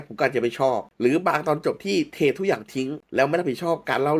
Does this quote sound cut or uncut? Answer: uncut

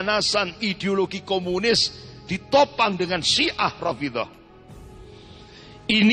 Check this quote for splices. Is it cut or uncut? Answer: uncut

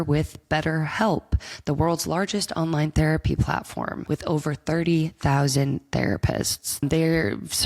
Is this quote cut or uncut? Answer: cut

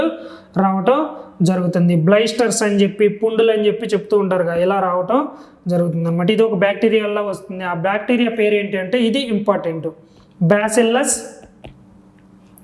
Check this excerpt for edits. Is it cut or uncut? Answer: uncut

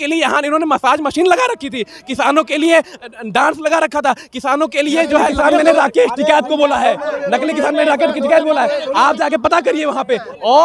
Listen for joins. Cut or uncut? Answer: cut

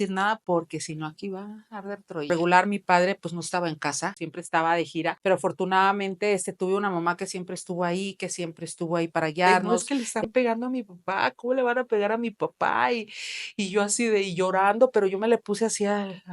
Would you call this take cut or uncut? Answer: cut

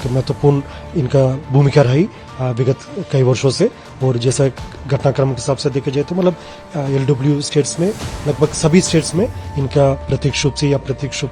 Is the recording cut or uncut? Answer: uncut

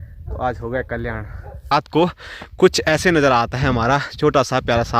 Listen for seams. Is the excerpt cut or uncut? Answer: cut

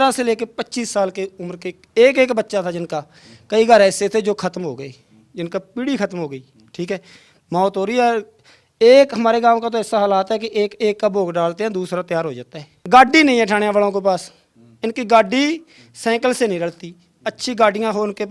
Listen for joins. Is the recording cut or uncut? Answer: cut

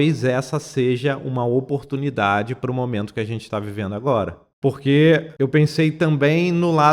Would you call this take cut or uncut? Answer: cut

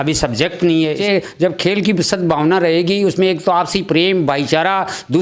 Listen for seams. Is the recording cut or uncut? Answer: cut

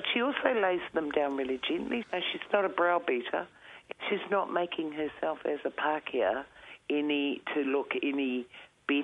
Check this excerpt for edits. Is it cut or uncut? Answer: cut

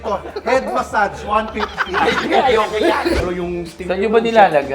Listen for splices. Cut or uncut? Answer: cut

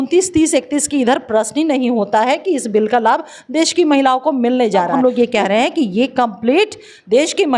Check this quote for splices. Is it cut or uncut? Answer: cut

